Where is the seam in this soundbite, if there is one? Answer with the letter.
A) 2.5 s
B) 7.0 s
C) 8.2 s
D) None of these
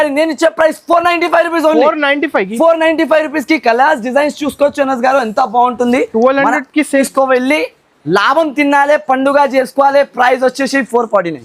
B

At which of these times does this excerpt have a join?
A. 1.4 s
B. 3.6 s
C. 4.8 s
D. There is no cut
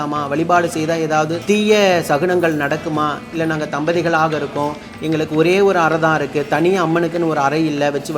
A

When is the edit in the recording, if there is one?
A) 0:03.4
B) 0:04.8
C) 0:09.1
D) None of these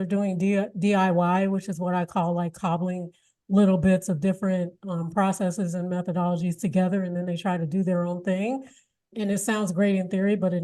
C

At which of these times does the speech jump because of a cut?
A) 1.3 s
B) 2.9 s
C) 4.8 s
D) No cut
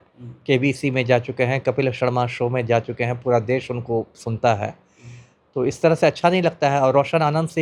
D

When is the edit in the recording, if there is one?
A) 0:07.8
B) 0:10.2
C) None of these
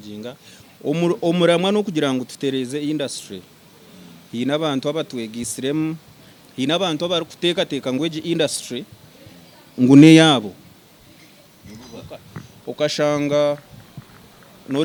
C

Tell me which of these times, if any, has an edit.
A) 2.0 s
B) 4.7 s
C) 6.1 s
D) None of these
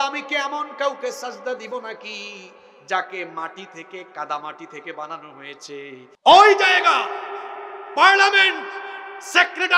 C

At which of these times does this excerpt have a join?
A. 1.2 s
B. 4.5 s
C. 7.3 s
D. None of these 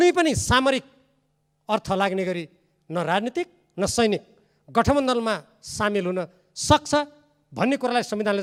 D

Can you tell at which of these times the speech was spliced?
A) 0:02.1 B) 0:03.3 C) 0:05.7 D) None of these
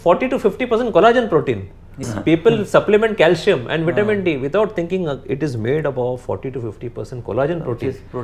A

